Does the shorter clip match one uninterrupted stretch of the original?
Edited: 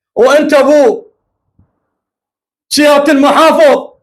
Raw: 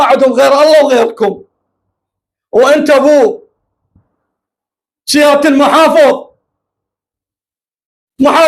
yes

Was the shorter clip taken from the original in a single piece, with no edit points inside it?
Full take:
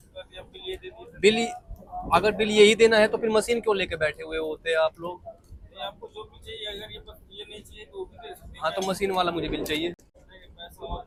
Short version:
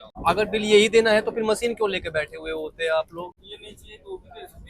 no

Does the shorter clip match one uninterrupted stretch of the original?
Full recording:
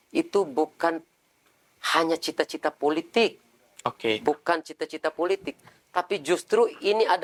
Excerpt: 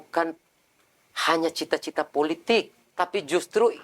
no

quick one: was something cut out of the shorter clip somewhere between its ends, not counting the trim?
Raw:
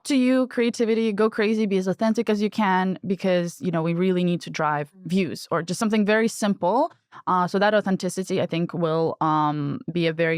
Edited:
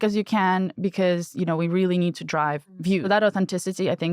yes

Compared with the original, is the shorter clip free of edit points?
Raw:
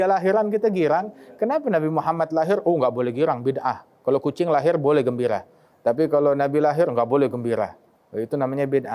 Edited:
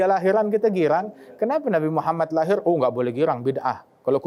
yes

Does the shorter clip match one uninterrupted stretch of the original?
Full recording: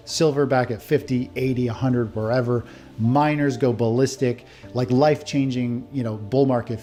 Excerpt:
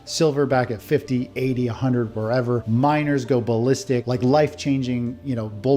no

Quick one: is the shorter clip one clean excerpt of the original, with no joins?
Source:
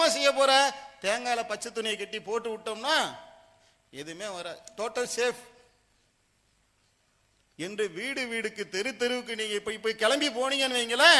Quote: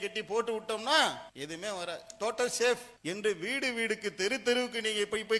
no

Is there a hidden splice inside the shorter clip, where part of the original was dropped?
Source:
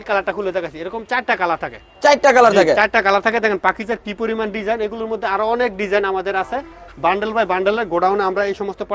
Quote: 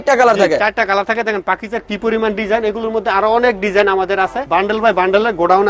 yes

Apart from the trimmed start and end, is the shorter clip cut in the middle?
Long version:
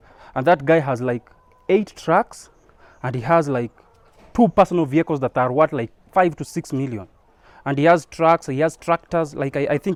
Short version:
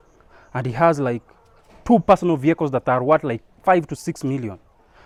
no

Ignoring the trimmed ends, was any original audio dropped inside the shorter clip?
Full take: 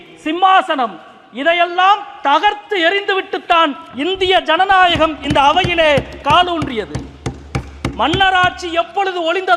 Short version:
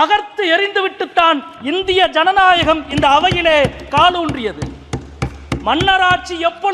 no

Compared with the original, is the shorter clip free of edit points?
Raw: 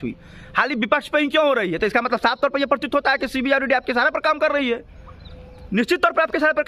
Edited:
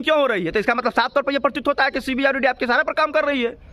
yes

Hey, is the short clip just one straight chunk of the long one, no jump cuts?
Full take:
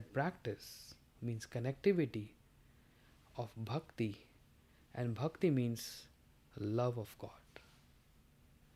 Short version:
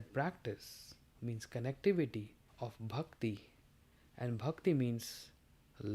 no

